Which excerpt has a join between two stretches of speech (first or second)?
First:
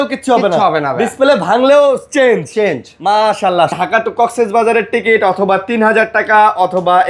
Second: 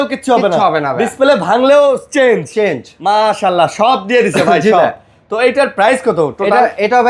first